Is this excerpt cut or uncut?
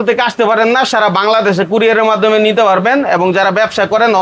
uncut